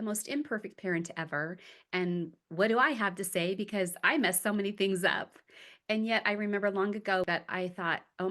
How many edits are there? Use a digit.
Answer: 1